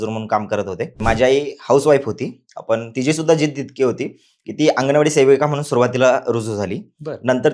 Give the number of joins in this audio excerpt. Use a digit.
1